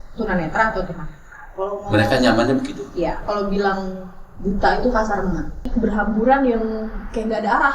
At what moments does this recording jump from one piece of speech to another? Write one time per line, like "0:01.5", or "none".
0:05.7